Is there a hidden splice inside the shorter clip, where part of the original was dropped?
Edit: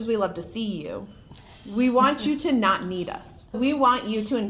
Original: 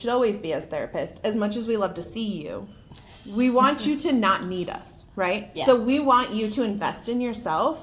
yes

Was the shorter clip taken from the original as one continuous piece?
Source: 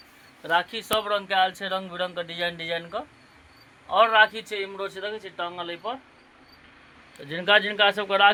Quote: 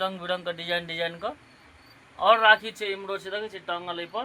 yes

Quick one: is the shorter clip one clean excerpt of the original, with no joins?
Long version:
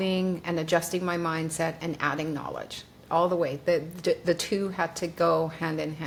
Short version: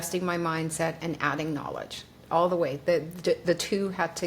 yes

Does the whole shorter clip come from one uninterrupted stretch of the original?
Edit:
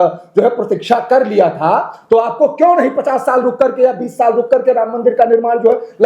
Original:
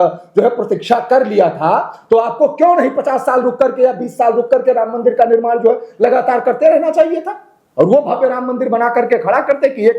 yes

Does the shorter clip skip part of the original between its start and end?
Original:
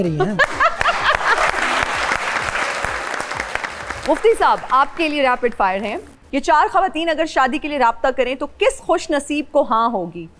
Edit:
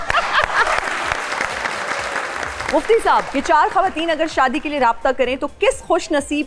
yes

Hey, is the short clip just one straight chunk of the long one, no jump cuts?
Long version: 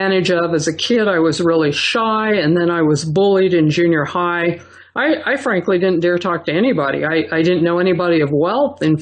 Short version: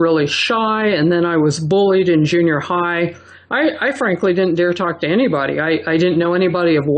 yes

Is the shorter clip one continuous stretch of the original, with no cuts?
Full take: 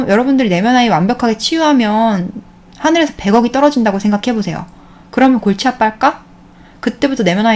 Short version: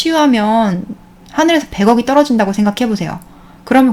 yes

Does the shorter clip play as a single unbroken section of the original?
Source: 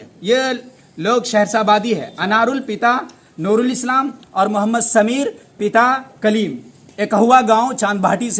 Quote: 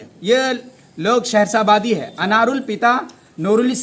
yes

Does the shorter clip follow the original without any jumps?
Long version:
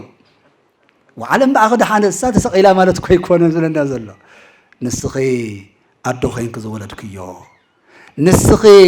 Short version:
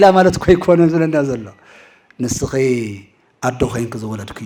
yes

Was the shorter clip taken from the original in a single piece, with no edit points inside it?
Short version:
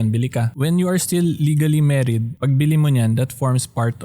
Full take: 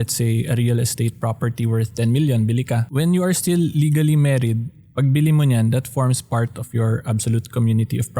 no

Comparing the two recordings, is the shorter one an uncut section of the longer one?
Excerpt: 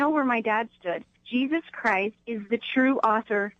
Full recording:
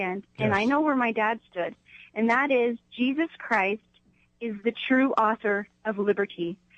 no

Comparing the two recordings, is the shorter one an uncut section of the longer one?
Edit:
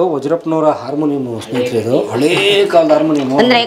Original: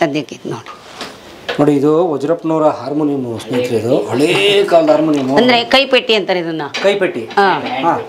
yes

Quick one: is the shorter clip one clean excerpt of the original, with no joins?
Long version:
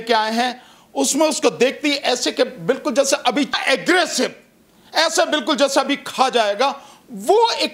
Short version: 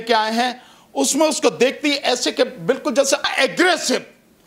no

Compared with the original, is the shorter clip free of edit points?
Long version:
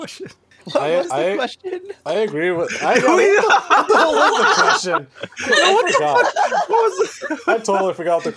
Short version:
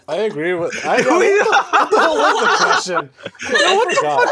yes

